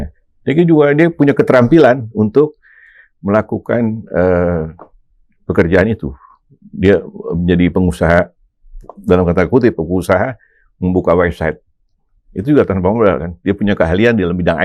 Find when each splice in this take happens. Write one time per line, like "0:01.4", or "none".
none

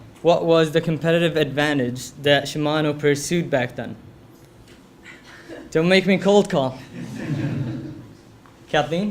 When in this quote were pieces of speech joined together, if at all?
0:00.9

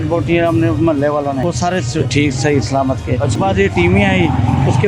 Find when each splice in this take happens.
0:01.5
0:03.4

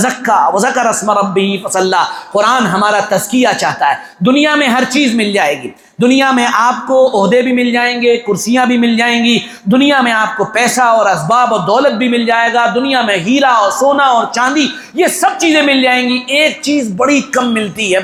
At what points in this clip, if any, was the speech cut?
none

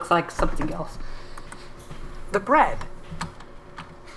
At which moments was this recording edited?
0:01.8

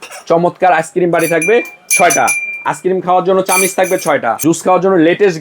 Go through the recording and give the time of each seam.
0:04.4

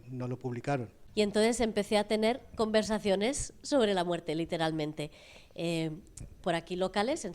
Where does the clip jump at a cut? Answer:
0:01.0

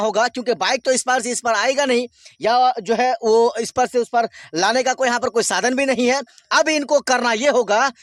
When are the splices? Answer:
none

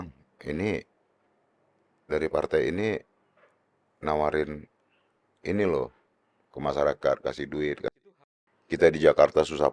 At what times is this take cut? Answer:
0:07.9

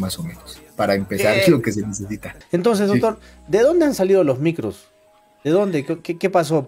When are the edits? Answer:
0:02.3

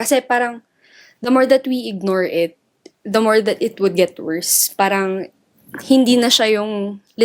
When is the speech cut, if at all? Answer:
none

